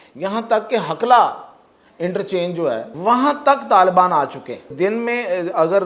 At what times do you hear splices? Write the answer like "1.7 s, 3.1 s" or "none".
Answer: 2.9 s, 4.7 s